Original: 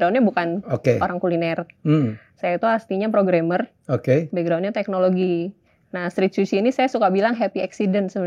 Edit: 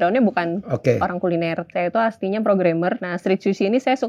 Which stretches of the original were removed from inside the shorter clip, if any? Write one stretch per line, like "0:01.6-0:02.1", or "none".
0:01.6-0:02.3
0:03.7-0:06.0